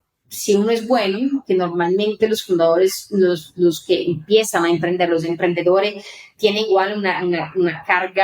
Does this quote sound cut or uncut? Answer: uncut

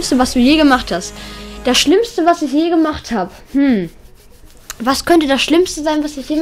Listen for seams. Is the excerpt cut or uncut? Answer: uncut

